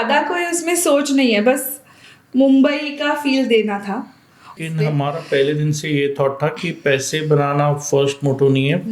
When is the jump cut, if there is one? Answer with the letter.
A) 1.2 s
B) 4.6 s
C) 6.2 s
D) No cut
B